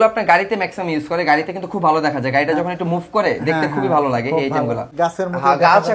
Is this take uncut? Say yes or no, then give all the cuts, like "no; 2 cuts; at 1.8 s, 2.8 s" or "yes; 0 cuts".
no; 1 cut; at 4.9 s